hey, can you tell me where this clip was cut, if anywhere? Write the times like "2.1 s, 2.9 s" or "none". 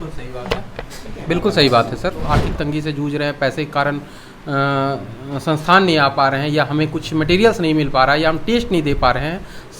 2.3 s